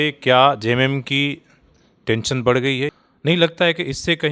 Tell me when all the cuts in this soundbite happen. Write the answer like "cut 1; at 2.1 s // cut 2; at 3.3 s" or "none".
cut 1; at 3.0 s

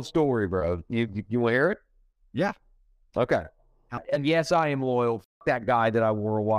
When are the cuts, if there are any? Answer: cut 1; at 4.0 s

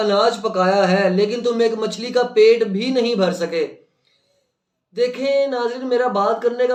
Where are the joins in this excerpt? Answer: none

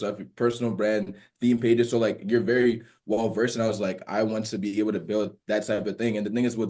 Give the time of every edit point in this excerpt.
none

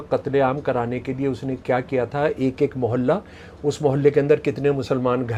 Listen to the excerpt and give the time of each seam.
none

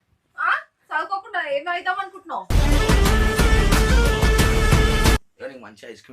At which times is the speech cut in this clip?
cut 1; at 5.2 s

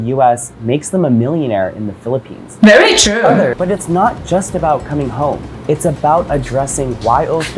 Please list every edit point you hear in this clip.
cut 1; at 2.4 s // cut 2; at 3.5 s

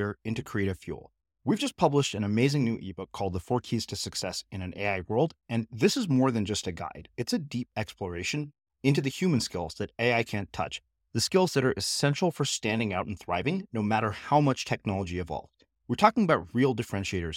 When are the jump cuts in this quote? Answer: none

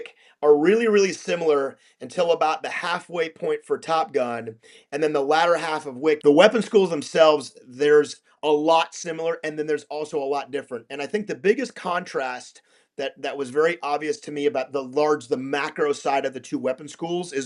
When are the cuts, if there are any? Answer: cut 1; at 6.2 s

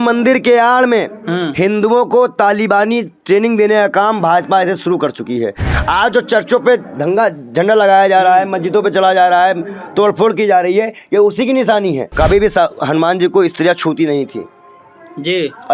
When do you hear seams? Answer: cut 1; at 12.1 s

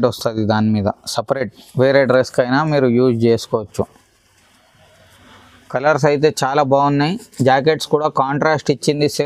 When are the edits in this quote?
cut 1; at 5.7 s

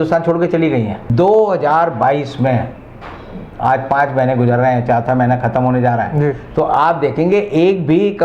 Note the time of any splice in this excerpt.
cut 1; at 1.0 s

